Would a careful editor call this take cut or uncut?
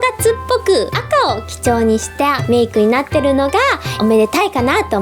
cut